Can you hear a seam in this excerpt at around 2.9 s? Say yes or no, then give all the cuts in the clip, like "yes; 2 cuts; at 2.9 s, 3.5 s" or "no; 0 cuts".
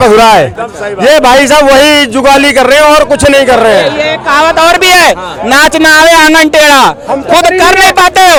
no; 0 cuts